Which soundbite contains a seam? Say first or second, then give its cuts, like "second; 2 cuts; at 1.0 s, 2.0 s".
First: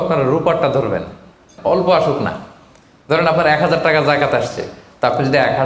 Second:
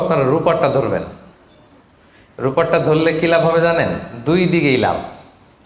first; 1 cut; at 1.5 s